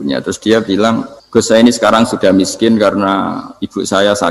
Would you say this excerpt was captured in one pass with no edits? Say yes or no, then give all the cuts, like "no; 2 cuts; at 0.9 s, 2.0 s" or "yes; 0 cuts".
no; 1 cut; at 1.1 s